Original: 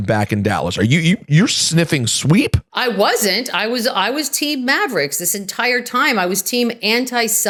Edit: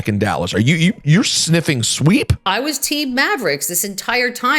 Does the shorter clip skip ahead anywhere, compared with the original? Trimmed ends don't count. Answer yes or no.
yes